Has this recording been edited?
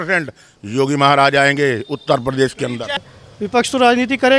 yes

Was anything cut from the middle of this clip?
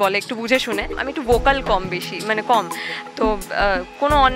yes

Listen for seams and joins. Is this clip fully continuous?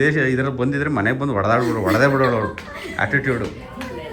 yes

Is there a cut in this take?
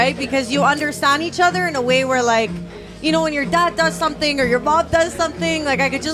no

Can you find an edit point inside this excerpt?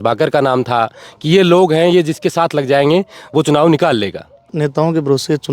yes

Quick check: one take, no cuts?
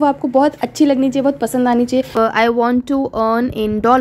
no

